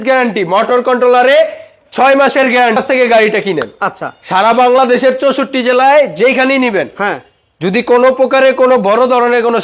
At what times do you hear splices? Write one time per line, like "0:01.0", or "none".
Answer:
0:02.8